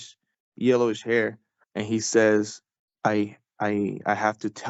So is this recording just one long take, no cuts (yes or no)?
yes